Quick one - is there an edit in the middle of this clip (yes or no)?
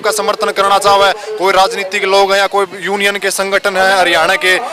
no